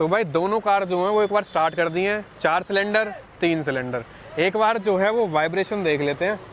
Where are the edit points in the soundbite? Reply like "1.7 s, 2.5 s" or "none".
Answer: none